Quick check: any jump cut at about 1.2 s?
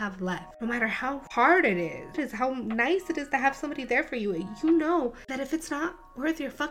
yes; 2 cuts; at 1.2 s, 2.2 s

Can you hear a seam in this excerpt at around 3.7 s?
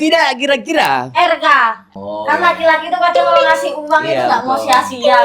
no; 1 cut; at 1.8 s

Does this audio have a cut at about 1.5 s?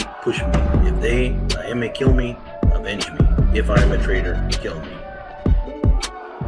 no; 1 cut; at 5.1 s

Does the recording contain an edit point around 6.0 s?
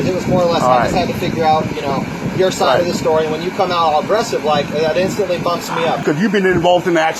yes; 1 cut; at 6.0 s

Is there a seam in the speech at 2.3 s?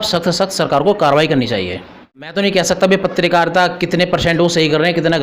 yes; 1 cut; at 2.3 s

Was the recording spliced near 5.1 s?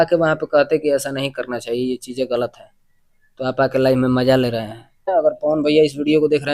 yes; 1 cut; at 5.1 s

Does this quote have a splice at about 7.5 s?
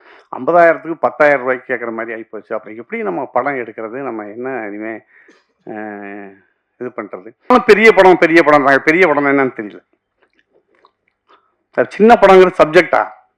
yes; 1 cut; at 7.5 s

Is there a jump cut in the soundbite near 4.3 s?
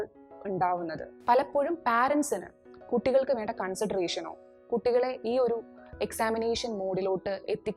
no; 1 cut; at 1.1 s

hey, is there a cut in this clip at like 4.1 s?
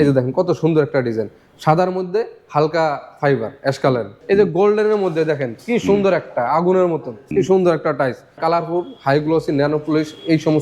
yes; 3 cuts; at 4.1 s, 7.1 s, 8.4 s

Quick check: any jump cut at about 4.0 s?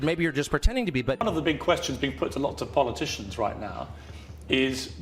no; 1 cut; at 1.2 s

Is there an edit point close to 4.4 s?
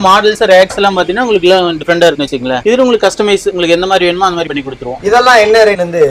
no; 0 cuts

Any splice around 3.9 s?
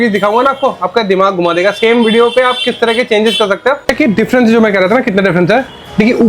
yes; 1 cut; at 3.9 s

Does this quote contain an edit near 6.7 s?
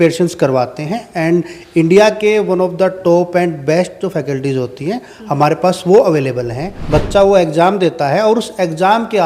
yes; 1 cut; at 6.7 s

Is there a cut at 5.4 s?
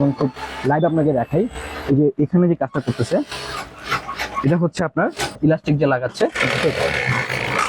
yes; 1 cut; at 5.4 s

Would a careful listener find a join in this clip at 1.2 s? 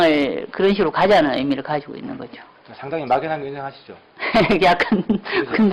yes; 1 cut; at 1.2 s

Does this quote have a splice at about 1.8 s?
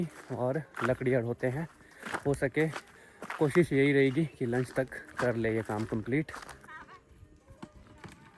no; 0 cuts

